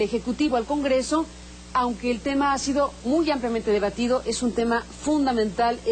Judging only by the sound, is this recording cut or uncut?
cut